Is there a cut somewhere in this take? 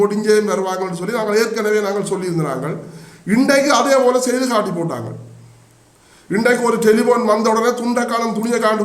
no; 0 cuts

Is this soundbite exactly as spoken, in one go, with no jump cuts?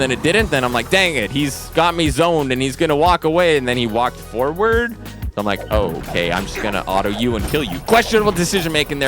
no; 1 cut; at 7.8 s

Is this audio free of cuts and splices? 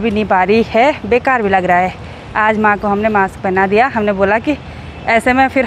yes; 0 cuts

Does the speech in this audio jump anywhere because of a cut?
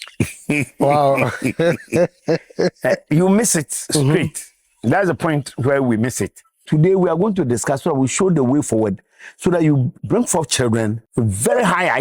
yes; 3 cuts; at 6.6 s, 10.0 s, 11.0 s

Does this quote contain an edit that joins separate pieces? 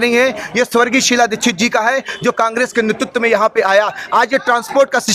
no; 0 cuts

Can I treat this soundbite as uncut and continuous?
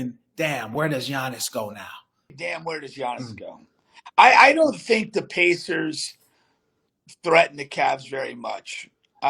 no; 1 cut; at 2.3 s

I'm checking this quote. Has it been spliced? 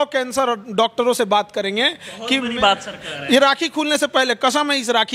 no; 0 cuts

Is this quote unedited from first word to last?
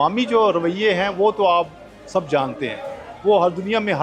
yes; 0 cuts

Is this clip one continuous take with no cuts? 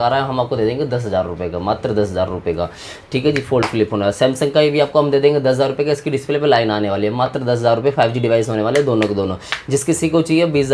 yes; 0 cuts

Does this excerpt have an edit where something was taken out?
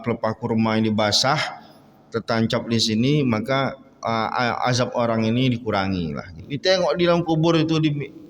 yes; 1 cut; at 6.5 s

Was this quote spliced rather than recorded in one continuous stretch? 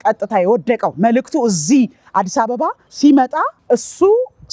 no; 0 cuts

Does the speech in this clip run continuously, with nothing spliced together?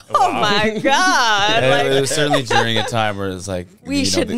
yes; 0 cuts

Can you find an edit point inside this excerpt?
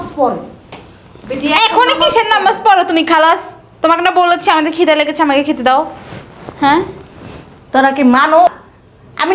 no; 0 cuts

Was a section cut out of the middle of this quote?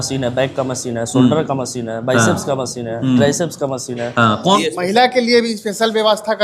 yes; 1 cut; at 4.6 s

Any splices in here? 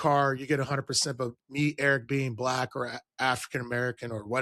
no; 0 cuts

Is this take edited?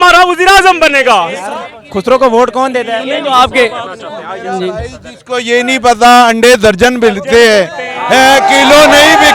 yes; 1 cut; at 1.4 s

